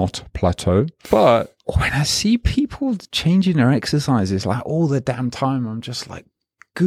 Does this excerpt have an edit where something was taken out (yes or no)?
yes